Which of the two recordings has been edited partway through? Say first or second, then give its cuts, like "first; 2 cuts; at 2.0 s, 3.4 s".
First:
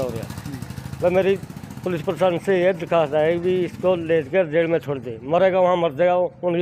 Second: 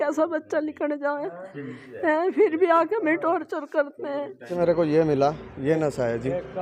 second; 1 cut; at 4.5 s